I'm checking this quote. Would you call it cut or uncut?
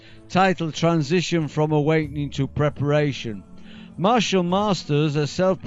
cut